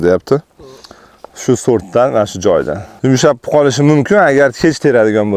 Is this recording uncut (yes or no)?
no